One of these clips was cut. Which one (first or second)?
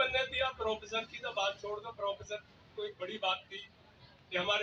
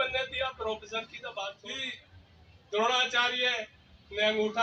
second